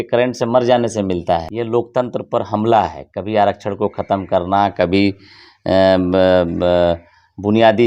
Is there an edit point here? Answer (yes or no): yes